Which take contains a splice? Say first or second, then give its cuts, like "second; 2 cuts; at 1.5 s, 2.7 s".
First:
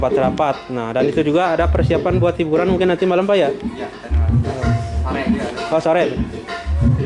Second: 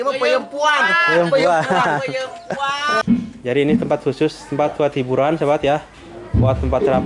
second; 1 cut; at 3.0 s